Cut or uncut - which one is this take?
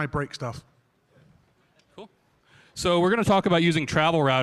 cut